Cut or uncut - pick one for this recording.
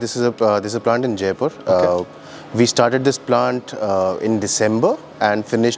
uncut